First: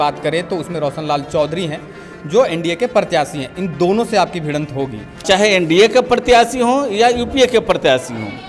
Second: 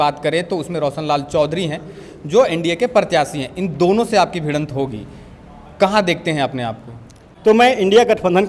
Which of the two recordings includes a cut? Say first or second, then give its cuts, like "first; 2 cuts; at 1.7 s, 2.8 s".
first; 1 cut; at 5.2 s